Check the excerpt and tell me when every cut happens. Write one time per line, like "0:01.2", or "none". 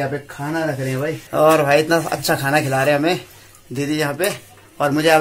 0:01.2